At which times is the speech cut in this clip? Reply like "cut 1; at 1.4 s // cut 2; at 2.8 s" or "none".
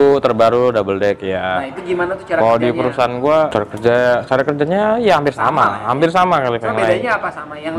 cut 1; at 3.5 s